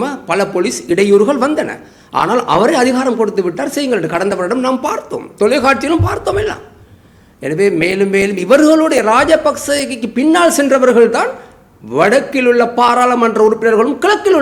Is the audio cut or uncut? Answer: uncut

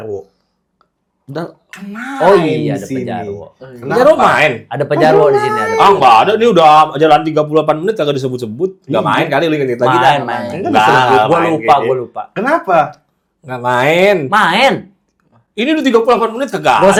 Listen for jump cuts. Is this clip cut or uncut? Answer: uncut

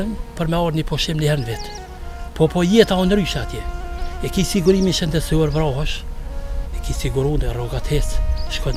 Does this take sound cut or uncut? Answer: uncut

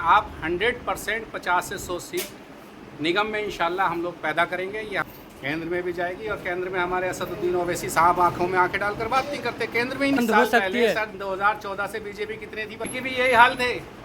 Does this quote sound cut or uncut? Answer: cut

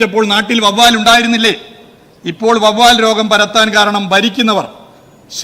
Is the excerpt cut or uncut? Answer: uncut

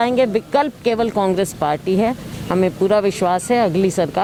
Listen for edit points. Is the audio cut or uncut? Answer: uncut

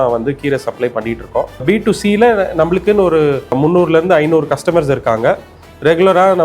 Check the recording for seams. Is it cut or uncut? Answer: cut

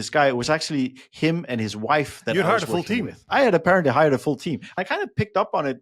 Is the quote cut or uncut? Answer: cut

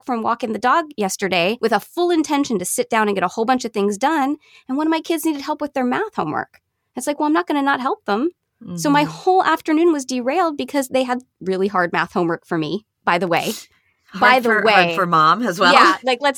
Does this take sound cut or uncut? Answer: cut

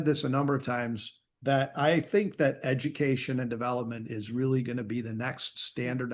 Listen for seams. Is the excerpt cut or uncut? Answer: uncut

